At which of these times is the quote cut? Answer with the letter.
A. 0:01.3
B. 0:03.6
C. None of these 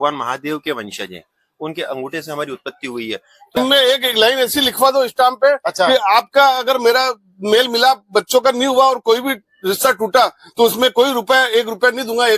B